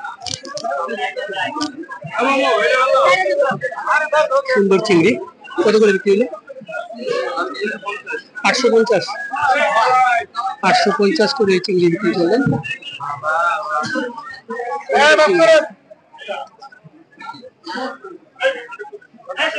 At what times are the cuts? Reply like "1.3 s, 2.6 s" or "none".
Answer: none